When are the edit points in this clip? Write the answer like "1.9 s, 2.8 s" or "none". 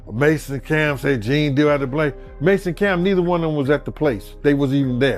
none